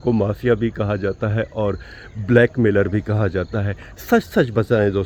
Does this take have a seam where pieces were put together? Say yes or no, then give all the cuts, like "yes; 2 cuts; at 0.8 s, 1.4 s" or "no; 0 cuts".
no; 0 cuts